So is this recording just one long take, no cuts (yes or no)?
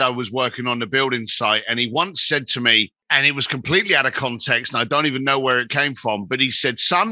no